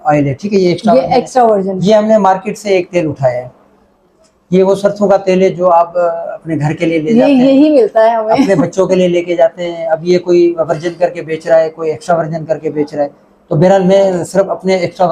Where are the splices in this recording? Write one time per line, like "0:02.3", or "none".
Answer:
none